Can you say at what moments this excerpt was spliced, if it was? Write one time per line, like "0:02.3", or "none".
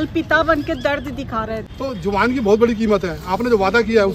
0:01.7